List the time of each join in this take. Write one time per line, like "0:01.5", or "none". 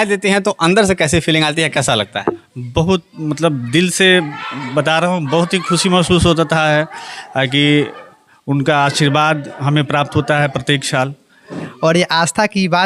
0:11.7